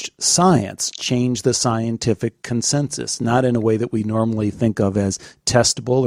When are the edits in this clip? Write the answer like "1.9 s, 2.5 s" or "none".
none